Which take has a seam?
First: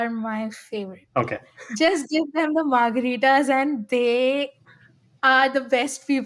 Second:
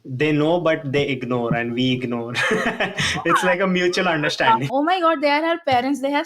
second; 1 cut; at 4.7 s

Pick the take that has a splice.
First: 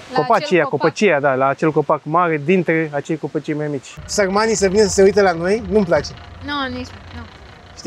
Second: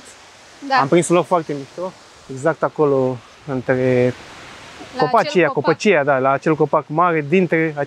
first; 1 cut; at 4.1 s

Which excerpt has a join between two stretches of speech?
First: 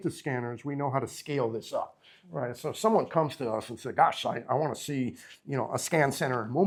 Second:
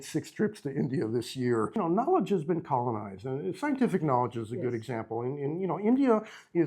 second; 1 cut; at 1.7 s

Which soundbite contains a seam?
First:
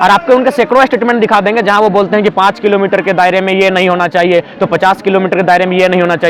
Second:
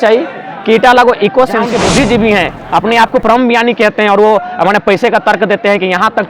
second; 1 cut; at 1.7 s

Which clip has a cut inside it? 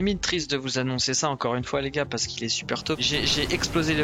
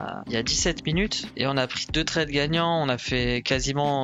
first; 1 cut; at 3.0 s

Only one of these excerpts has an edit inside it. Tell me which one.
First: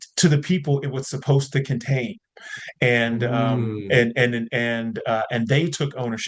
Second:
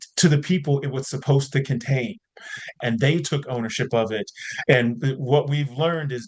second; 1 cut; at 2.8 s

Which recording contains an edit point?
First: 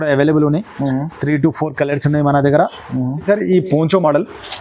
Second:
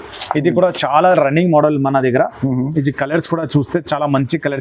first; 1 cut; at 3.2 s

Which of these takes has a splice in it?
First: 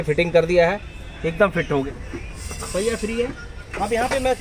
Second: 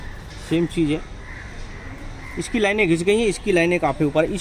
first; 1 cut; at 1.9 s

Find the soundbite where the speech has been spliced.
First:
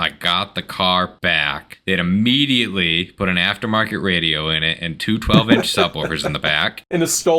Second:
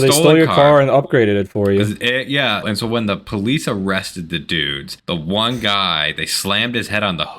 first; 1 cut; at 1.6 s

